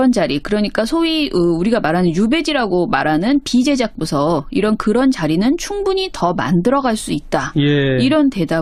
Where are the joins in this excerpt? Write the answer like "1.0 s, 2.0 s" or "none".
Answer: 7.0 s

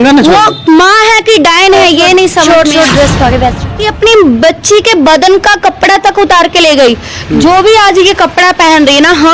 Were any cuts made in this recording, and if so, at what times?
3.7 s

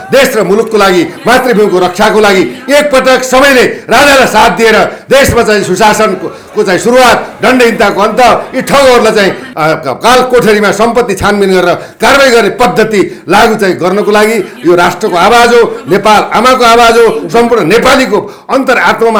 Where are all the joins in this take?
none

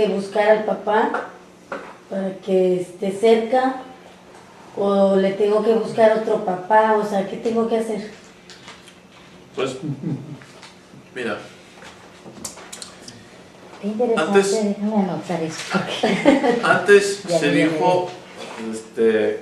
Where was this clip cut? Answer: none

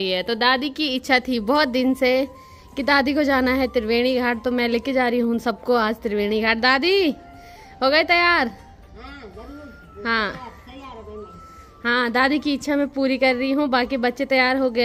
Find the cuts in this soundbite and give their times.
none

